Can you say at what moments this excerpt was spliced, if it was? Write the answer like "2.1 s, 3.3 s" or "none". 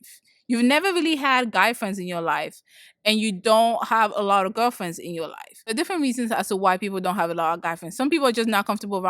5.7 s